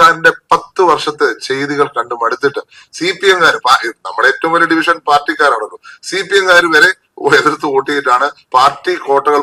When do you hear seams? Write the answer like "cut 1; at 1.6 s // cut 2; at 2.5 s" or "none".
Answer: none